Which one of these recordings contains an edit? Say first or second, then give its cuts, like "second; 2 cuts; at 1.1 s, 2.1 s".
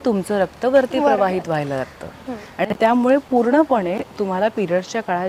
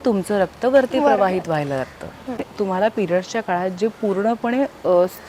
second; 1 cut; at 2.4 s